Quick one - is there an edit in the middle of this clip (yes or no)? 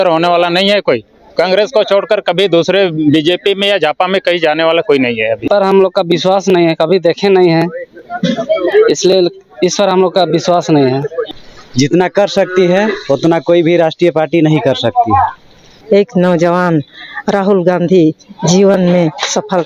yes